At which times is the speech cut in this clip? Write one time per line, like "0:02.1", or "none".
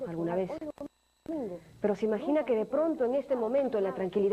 0:03.0